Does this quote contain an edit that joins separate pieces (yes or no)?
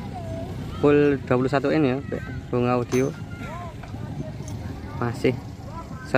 no